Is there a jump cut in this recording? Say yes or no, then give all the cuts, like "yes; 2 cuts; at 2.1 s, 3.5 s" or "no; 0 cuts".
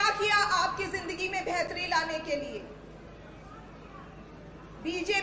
no; 0 cuts